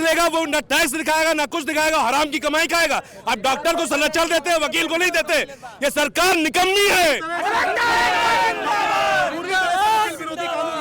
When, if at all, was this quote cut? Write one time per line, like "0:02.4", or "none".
none